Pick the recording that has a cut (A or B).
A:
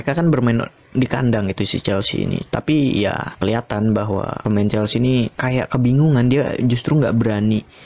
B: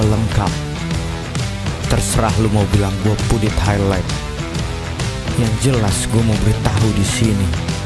A